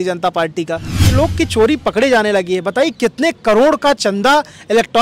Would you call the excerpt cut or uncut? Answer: cut